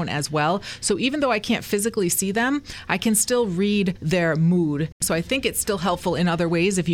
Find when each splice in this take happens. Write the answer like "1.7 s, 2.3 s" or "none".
4.0 s, 5.0 s